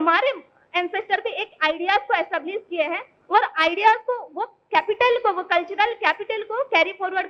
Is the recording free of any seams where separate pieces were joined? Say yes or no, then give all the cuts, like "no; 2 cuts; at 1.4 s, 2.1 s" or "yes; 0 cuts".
yes; 0 cuts